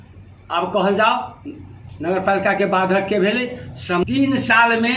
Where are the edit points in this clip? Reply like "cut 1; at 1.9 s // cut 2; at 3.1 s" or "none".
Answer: cut 1; at 4.0 s